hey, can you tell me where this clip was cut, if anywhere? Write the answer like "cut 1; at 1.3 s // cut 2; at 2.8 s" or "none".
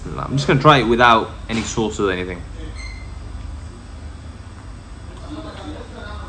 none